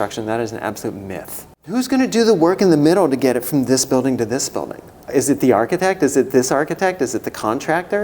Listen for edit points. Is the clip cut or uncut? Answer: cut